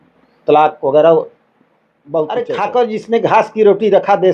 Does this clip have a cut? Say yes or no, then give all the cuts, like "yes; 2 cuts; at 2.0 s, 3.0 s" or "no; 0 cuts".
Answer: yes; 1 cut; at 2.5 s